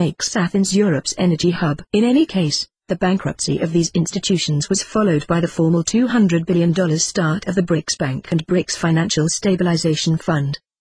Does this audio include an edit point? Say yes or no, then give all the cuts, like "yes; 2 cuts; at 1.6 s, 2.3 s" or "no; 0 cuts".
yes; 1 cut; at 3.1 s